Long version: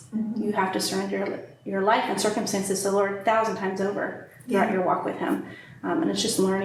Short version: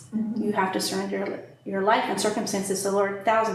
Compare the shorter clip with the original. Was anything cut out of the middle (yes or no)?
no